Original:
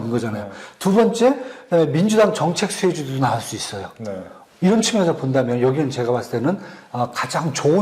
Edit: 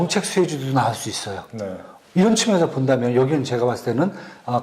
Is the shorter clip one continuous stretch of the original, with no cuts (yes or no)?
yes